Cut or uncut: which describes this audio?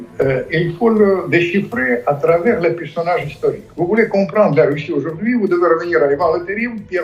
uncut